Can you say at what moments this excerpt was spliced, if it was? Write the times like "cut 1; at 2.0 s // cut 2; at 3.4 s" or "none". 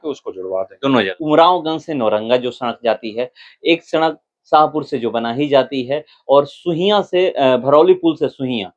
cut 1; at 1.2 s